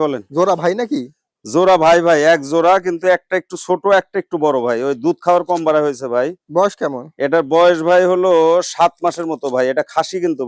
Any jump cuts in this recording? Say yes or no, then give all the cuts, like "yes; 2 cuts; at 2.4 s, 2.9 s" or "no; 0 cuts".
no; 0 cuts